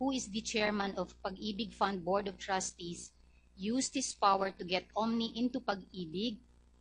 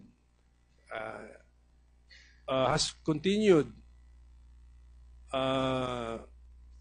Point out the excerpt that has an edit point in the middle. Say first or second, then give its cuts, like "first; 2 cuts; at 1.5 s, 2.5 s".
first; 1 cut; at 5.2 s